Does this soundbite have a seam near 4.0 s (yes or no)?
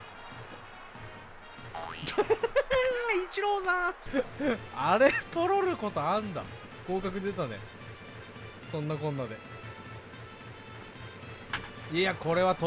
yes